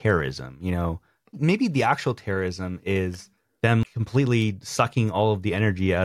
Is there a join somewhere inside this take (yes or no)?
yes